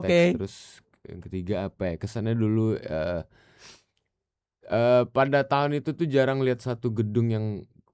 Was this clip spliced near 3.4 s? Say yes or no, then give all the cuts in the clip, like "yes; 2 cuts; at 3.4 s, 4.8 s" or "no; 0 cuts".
no; 0 cuts